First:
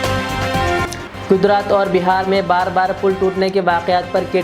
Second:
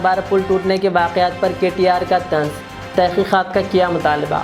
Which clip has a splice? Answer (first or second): first